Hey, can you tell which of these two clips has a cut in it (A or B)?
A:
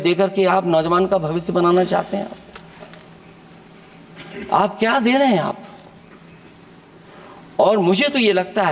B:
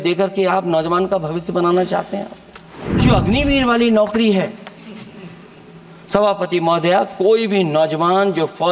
B